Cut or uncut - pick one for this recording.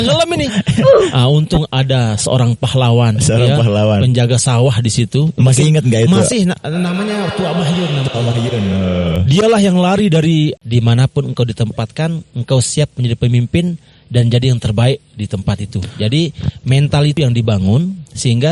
cut